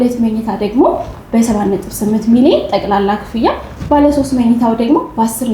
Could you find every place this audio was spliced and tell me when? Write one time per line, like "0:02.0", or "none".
none